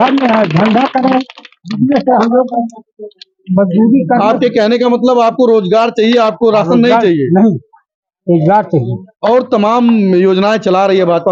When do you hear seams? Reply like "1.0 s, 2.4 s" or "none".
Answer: none